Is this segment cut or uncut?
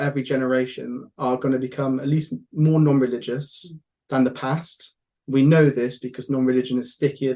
uncut